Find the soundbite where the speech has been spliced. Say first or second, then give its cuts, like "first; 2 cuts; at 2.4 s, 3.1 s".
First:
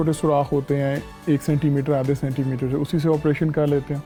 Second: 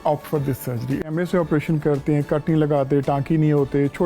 second; 1 cut; at 1.1 s